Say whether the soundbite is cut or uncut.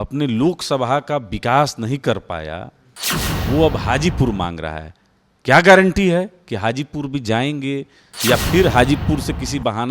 cut